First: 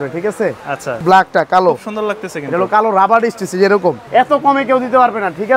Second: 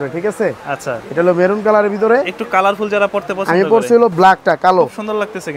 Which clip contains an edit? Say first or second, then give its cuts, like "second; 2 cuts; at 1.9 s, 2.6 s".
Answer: first; 2 cuts; at 1.0 s, 4.0 s